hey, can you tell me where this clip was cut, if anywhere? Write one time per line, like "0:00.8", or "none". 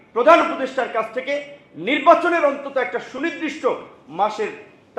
none